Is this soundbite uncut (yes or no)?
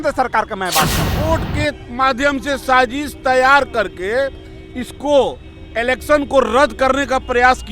no